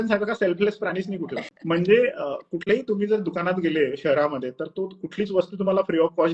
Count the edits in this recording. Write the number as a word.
one